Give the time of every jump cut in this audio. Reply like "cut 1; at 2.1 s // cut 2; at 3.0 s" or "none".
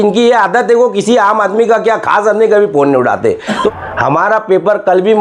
cut 1; at 3.7 s